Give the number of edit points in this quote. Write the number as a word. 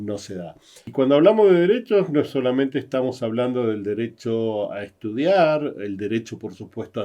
one